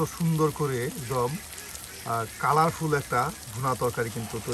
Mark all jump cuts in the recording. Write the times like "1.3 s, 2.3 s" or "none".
none